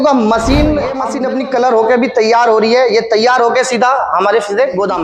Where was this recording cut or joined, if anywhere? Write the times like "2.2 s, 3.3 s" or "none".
1.1 s

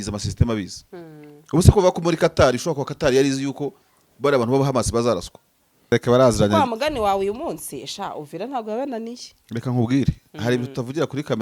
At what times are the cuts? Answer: 5.9 s

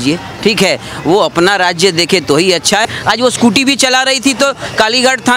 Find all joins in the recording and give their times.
2.9 s

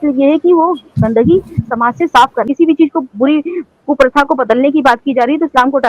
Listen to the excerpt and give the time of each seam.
2.4 s

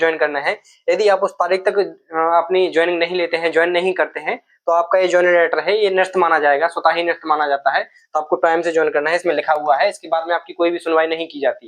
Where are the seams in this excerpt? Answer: none

